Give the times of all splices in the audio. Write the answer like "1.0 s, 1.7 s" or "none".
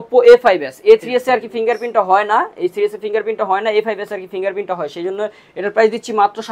none